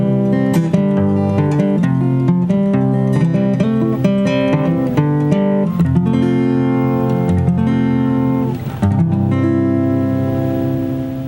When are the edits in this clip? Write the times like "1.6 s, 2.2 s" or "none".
3.2 s